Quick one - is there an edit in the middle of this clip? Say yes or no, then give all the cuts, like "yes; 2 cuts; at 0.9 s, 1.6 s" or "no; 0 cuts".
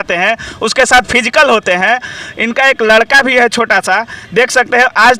no; 0 cuts